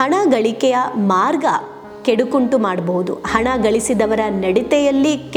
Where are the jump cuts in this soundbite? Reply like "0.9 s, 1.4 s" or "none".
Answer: none